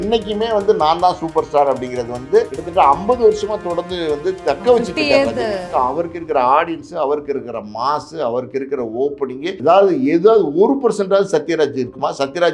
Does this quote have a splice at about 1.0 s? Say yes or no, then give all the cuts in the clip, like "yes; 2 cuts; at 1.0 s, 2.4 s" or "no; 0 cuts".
no; 3 cuts; at 2.6 s, 5.6 s, 9.6 s